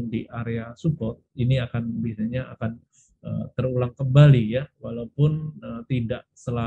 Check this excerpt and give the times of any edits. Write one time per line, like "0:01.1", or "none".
none